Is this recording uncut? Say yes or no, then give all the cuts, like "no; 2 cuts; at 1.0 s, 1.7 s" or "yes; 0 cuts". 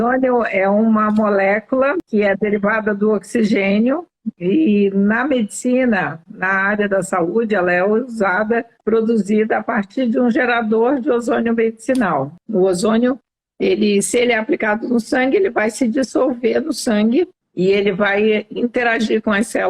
no; 4 cuts; at 2.0 s, 8.8 s, 12.4 s, 17.4 s